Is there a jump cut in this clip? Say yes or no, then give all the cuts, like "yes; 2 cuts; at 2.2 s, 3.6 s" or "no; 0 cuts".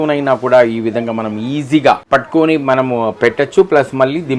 yes; 1 cut; at 2.0 s